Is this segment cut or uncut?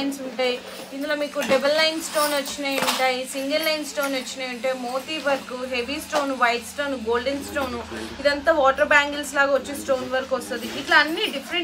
uncut